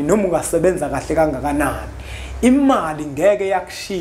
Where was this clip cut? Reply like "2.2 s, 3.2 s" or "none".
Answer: none